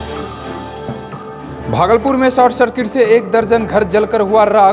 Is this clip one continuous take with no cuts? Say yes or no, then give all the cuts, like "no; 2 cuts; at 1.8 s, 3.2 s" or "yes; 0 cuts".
no; 1 cut; at 1.2 s